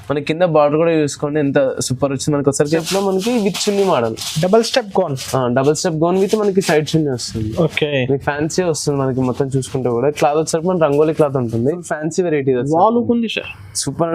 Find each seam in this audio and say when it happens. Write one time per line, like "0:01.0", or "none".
0:02.8
0:11.8

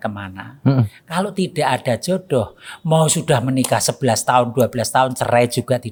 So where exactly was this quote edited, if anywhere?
none

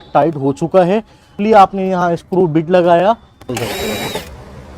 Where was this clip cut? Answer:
0:01.3
0:03.5

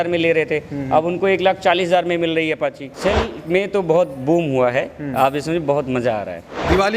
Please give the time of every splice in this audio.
0:02.9

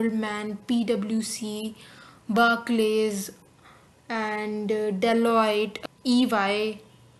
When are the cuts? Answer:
none

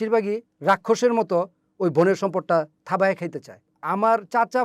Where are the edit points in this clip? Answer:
0:03.7

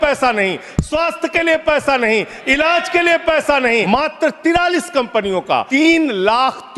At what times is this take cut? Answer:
0:03.9
0:05.7

